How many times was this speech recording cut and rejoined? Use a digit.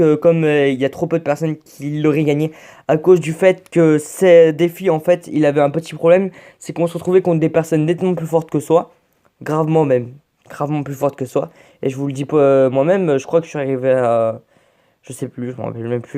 1